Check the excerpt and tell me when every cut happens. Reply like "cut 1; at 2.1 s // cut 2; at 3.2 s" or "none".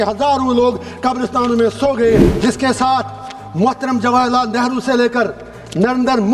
cut 1; at 2.3 s

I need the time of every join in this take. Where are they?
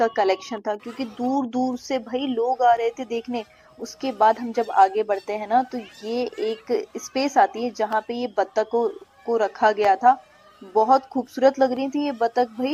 none

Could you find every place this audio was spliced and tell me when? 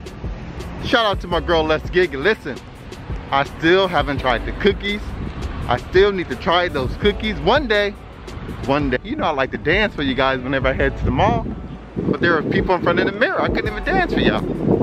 cut 1; at 9.0 s

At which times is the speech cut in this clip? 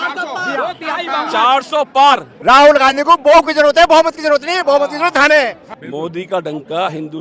cut 1; at 2.3 s // cut 2; at 5.7 s

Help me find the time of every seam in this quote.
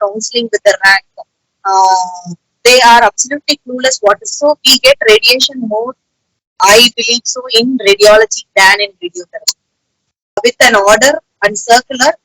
cut 1; at 4.3 s // cut 2; at 10.4 s

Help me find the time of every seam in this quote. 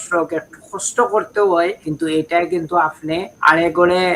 cut 1; at 1.8 s // cut 2; at 3.3 s

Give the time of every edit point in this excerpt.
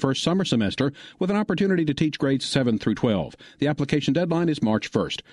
none

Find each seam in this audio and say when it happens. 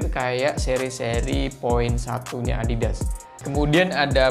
cut 1; at 3.3 s

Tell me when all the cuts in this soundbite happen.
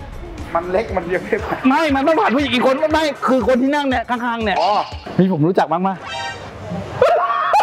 cut 1; at 5.1 s

